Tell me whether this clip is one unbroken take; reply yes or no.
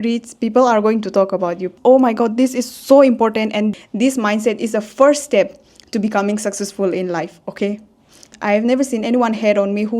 no